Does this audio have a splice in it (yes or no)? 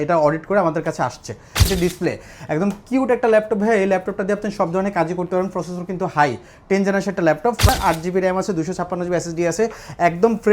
yes